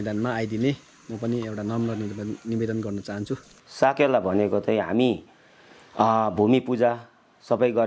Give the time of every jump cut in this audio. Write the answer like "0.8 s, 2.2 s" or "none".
3.6 s